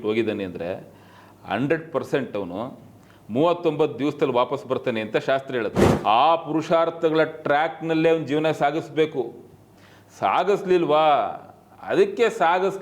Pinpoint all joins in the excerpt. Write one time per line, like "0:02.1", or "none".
0:05.9